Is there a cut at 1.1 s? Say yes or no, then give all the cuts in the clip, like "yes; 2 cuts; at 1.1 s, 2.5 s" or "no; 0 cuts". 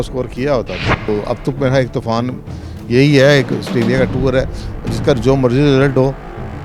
yes; 1 cut; at 1.1 s